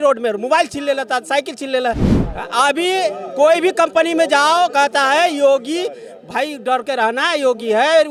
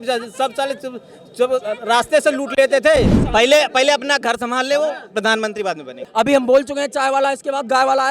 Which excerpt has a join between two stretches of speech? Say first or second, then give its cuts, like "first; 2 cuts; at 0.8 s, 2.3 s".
second; 2 cuts; at 3.2 s, 6.0 s